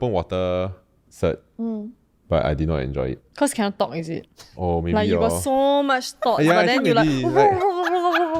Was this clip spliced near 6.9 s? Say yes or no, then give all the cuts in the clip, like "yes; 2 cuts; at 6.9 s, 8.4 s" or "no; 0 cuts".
no; 0 cuts